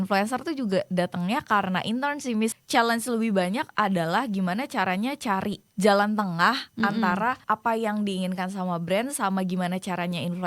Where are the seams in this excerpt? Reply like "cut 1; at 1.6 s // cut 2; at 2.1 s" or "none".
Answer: cut 1; at 2.6 s // cut 2; at 5.6 s // cut 3; at 7.4 s